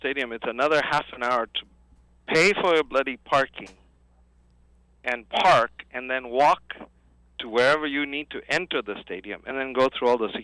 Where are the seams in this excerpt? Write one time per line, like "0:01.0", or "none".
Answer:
none